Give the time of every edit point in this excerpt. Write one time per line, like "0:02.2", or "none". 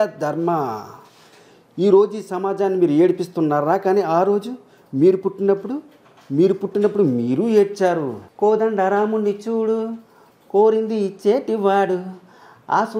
0:08.2